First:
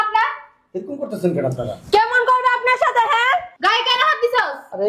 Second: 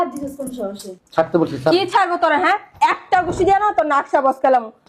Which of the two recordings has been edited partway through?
first; 1 cut; at 3.5 s

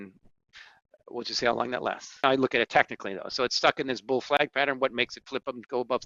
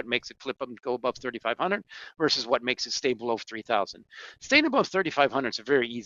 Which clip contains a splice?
first; 1 cut; at 2.1 s

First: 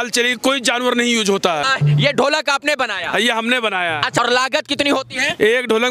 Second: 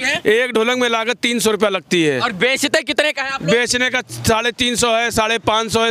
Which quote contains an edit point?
first; 2 cuts; at 1.6 s, 4.2 s

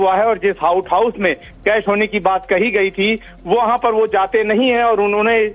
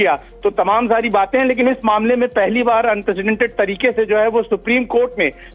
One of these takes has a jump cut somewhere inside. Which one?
first; 1 cut; at 1.9 s

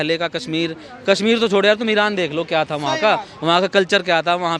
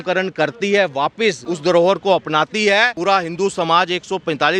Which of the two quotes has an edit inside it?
second; 2 cuts; at 1.5 s, 2.9 s

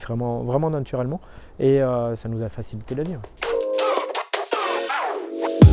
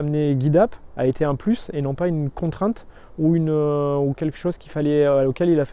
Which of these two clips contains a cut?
first; 1 cut; at 3.3 s

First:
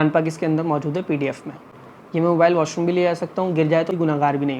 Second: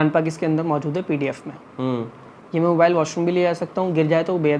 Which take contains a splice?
first; 2 cuts; at 1.7 s, 3.9 s

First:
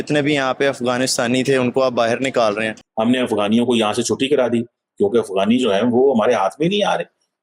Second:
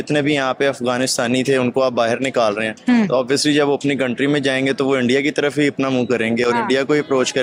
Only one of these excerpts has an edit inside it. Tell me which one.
first; 1 cut; at 2.7 s

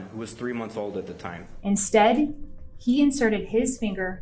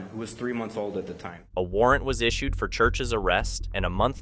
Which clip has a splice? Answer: first; 1 cut; at 1.4 s

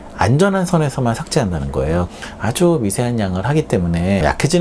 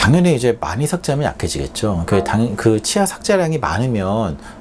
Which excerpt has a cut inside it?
first; 1 cut; at 2.1 s

